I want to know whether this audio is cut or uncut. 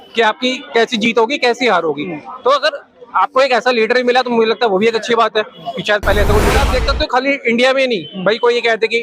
cut